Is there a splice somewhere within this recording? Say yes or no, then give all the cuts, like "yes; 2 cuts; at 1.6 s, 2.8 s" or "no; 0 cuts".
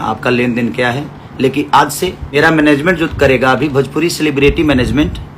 yes; 1 cut; at 2.3 s